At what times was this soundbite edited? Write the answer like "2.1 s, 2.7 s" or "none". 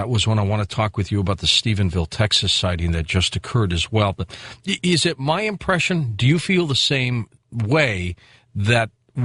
none